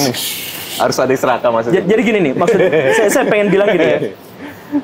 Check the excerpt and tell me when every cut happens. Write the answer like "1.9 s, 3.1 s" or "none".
none